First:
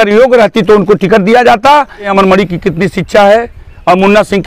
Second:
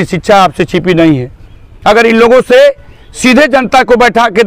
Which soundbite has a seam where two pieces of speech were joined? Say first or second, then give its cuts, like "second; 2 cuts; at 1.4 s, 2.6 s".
first; 1 cut; at 2.1 s